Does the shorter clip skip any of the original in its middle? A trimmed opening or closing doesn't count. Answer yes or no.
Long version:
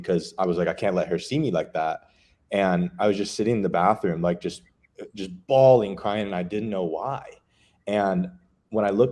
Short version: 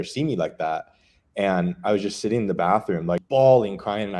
yes